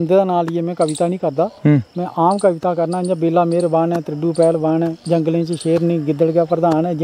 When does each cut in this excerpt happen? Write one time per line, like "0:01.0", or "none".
none

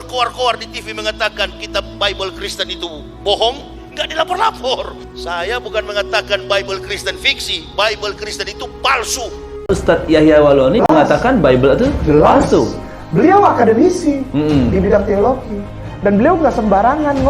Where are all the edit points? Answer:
0:09.5

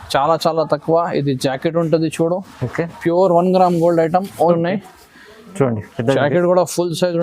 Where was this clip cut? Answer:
0:04.3

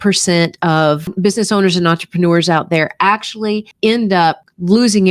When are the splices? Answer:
0:01.1

